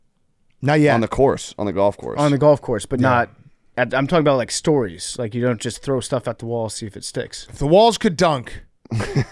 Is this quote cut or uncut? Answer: uncut